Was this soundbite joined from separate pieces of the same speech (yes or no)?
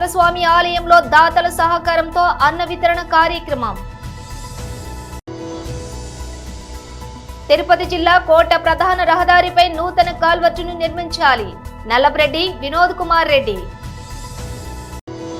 yes